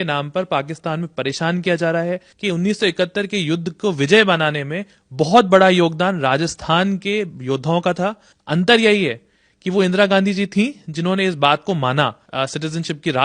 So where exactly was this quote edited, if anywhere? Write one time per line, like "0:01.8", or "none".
0:02.3
0:08.3
0:12.2